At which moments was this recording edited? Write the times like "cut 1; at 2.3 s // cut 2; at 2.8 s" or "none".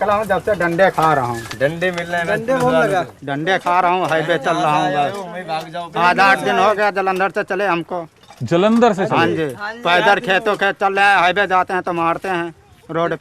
none